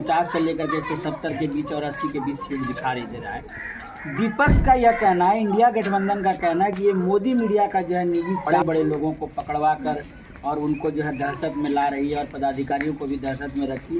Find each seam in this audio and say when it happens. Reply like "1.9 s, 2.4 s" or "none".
8.5 s